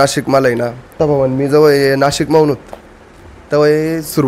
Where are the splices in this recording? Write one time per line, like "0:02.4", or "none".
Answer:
0:01.0